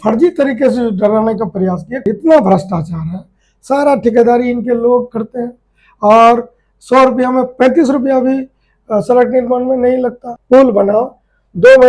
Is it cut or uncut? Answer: cut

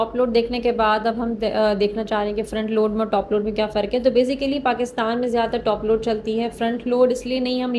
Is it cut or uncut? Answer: uncut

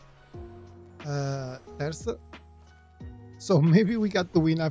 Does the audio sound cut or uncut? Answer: cut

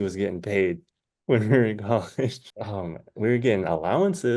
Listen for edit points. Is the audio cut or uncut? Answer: cut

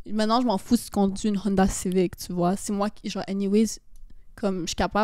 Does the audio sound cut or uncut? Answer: uncut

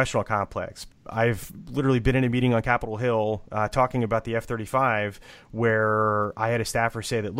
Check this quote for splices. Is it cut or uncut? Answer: cut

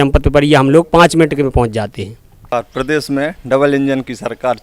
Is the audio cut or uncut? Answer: cut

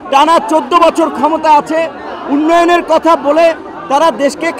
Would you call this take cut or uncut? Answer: uncut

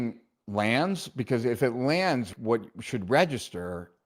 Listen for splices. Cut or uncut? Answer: cut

